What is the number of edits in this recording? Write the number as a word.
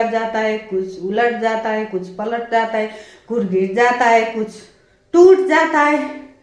zero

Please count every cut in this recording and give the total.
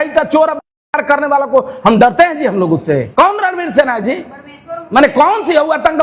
one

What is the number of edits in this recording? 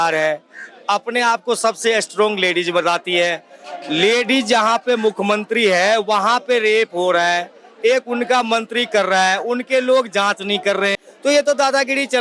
one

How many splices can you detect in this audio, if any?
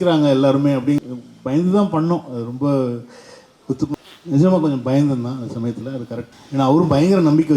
three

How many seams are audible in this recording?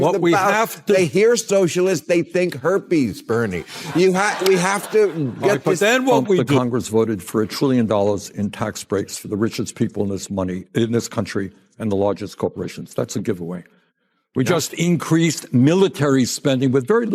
one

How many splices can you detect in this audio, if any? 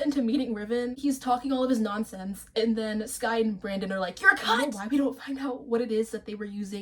two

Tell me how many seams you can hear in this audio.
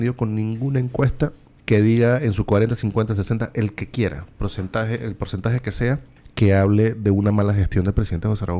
two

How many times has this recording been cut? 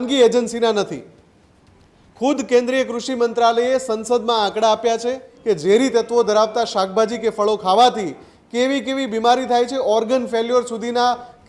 one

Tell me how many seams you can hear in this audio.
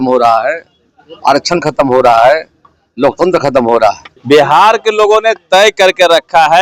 one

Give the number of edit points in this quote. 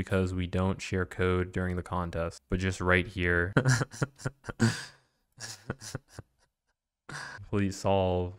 three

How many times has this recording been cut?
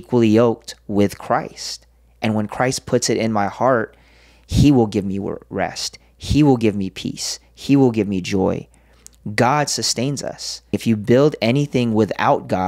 one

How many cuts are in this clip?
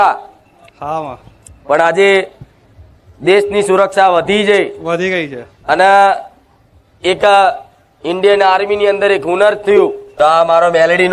one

